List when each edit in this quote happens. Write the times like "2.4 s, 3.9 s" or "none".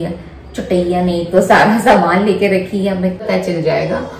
3.2 s